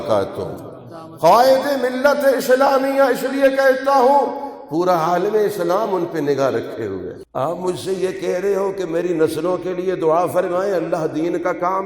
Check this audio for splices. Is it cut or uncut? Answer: cut